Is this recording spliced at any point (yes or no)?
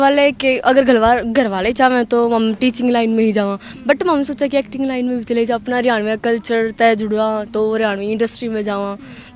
no